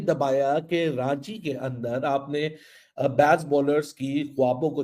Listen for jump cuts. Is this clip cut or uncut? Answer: uncut